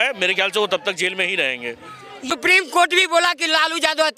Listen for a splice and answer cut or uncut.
cut